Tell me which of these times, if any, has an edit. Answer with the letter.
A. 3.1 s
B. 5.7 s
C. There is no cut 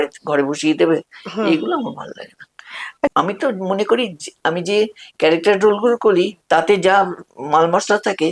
A